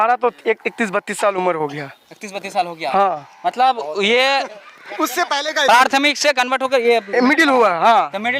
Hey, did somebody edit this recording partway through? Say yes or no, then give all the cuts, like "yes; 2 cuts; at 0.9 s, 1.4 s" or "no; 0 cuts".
no; 0 cuts